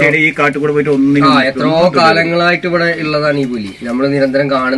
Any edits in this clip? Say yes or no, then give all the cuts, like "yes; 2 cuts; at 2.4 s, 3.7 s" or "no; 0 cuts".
no; 0 cuts